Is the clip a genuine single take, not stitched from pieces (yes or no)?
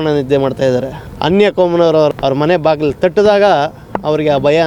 no